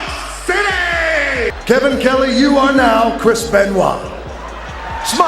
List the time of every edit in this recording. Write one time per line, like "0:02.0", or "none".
0:01.5